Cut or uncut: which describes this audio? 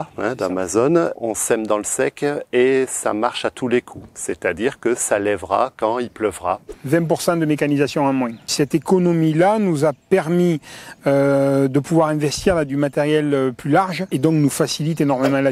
cut